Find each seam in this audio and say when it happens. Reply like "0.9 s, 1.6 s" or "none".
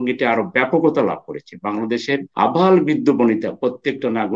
2.3 s